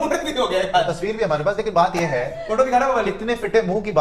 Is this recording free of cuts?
yes; 0 cuts

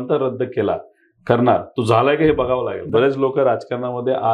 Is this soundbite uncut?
no; 1 cut; at 2.9 s

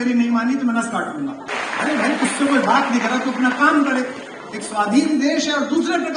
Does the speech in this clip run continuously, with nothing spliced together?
no; 1 cut; at 1.5 s

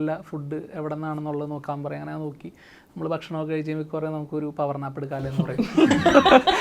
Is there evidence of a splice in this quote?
no; 0 cuts

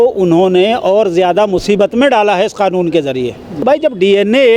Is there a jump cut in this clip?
yes; 1 cut; at 3.5 s

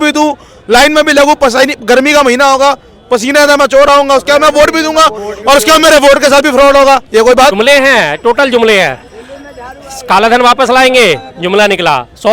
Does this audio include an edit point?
yes; 1 cut; at 7.5 s

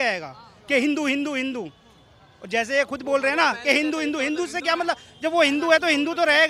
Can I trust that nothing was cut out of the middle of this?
yes; 0 cuts

